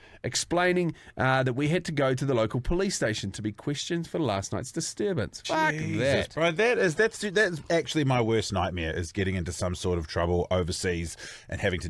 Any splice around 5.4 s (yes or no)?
yes